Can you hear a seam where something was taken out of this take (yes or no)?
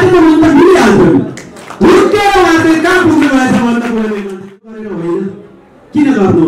yes